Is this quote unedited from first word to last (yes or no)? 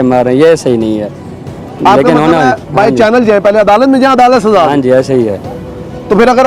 yes